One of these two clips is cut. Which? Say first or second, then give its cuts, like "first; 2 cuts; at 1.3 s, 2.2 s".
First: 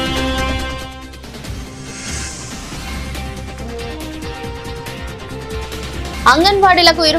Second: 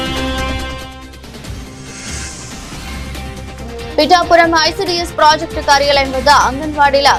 first; 2 cuts; at 3.8 s, 6.2 s